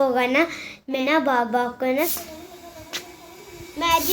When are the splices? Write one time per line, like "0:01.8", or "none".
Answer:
0:01.0
0:02.0